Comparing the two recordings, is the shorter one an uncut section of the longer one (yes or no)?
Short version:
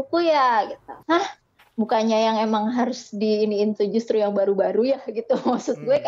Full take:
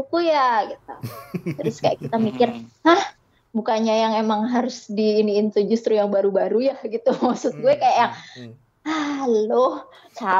no